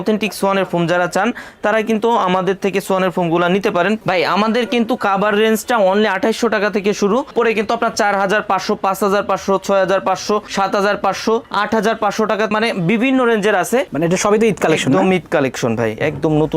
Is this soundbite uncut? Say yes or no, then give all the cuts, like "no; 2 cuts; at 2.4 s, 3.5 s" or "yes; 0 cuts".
no; 4 cuts; at 4.0 s, 7.3 s, 12.5 s, 13.9 s